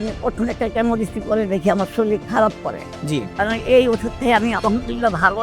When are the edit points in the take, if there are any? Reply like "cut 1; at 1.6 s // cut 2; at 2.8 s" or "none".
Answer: cut 1; at 3.3 s